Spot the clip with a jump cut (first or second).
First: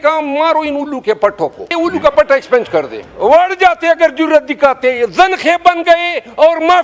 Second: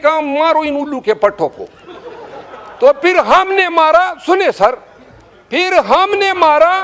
first